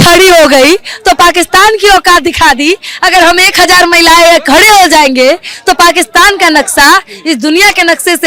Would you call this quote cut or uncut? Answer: uncut